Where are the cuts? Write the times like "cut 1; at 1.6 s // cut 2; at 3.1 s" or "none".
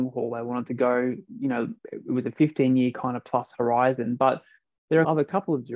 cut 1; at 1.8 s // cut 2; at 5.1 s